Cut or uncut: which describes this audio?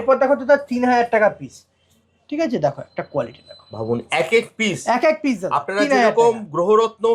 uncut